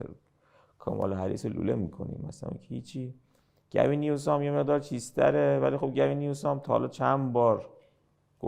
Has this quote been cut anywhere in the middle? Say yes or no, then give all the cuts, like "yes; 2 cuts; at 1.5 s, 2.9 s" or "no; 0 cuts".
no; 0 cuts